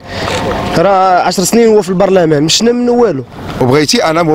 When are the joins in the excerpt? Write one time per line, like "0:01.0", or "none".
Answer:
0:03.4